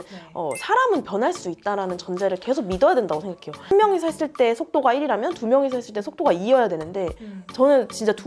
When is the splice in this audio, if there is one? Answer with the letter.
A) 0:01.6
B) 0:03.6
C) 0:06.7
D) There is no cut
B